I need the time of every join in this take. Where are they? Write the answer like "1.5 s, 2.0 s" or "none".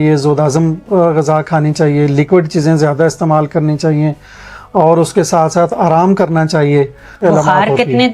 7.1 s